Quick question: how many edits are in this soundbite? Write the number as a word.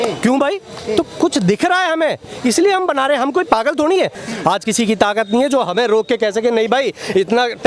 one